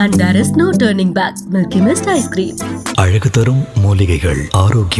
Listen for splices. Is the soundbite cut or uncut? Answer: uncut